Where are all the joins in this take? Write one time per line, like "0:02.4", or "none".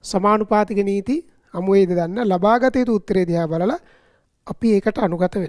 none

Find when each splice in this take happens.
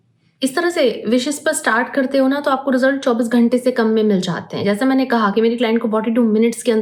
none

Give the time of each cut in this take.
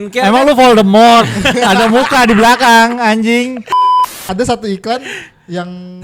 0:03.9

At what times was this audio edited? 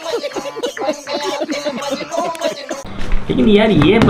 0:02.8

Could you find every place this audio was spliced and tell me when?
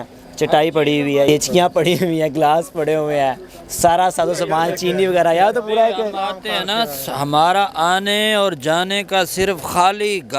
0:01.3

